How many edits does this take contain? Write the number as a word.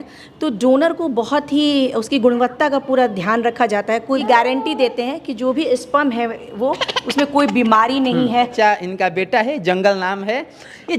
two